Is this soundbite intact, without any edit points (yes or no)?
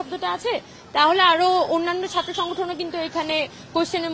yes